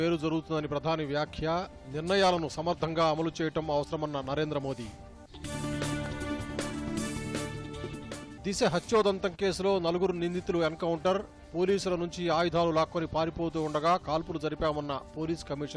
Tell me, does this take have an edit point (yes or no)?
no